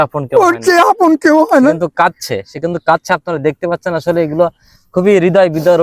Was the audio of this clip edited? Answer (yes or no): no